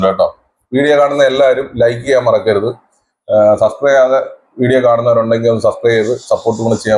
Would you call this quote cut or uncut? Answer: uncut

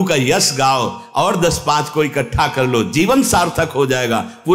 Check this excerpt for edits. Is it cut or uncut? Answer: uncut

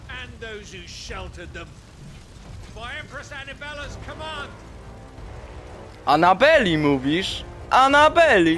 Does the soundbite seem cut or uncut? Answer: uncut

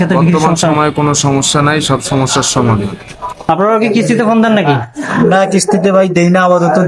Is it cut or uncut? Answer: cut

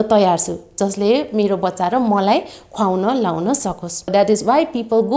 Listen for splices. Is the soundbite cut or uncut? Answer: cut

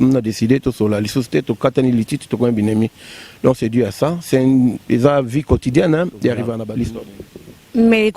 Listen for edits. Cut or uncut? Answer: cut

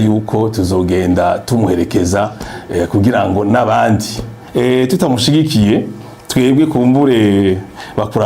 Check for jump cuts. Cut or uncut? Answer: cut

